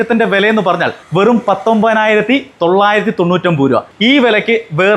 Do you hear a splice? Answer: yes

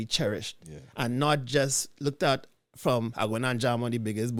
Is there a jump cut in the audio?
no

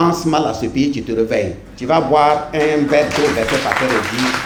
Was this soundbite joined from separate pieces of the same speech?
no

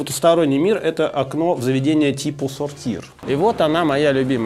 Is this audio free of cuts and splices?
no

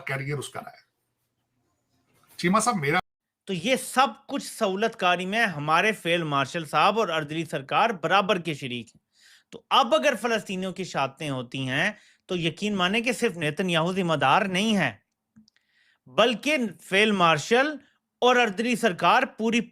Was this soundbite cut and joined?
yes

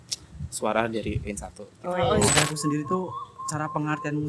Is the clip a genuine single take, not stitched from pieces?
no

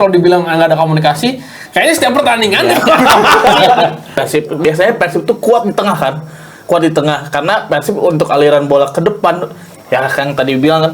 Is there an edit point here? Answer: yes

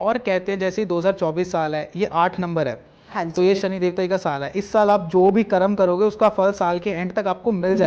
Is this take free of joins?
yes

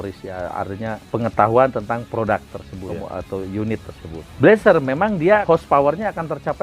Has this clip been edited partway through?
yes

